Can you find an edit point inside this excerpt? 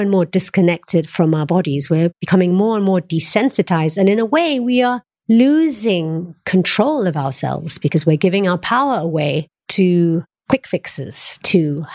no; 0 cuts

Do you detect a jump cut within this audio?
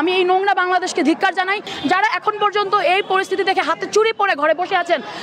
yes; 1 cut; at 1.7 s

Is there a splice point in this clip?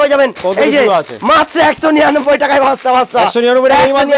no; 0 cuts

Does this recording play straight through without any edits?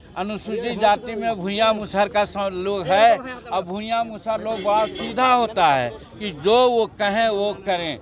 no; 1 cut; at 6.1 s

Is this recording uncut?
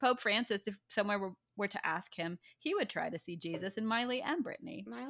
yes; 0 cuts

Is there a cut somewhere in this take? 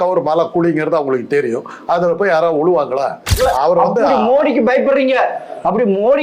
yes; 1 cut; at 3.3 s

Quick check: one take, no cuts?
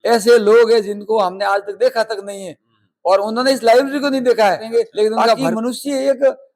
no; 1 cut; at 5.4 s

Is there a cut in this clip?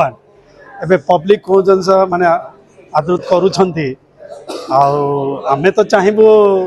no; 0 cuts

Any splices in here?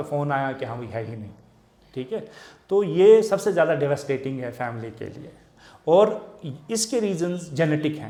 no; 0 cuts

